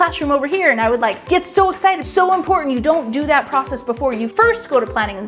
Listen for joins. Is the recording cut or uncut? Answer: cut